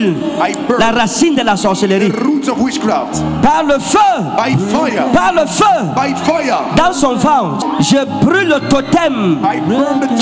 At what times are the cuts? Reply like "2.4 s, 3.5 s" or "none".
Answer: 7.6 s